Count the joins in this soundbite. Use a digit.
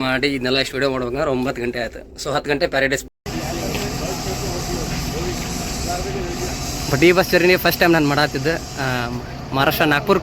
1